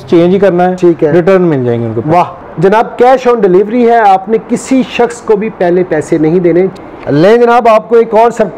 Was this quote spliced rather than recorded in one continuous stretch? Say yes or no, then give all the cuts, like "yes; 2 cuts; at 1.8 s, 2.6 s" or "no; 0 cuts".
yes; 2 cuts; at 2.4 s, 6.7 s